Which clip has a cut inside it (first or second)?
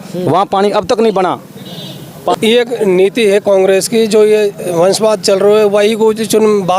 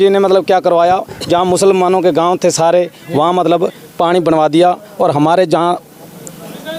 first